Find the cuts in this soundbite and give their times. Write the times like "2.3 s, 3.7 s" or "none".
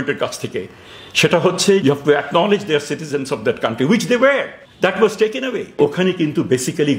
1.8 s, 4.6 s, 5.8 s